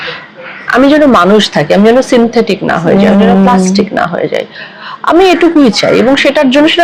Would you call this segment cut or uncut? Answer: uncut